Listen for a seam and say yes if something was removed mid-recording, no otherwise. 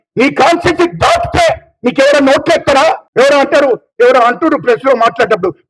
yes